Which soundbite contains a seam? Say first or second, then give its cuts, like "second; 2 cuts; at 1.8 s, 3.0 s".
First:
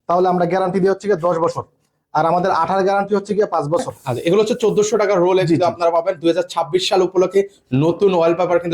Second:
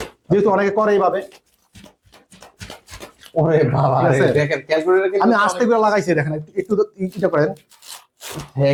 first; 1 cut; at 4.0 s